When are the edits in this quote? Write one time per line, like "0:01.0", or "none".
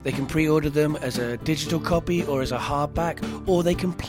none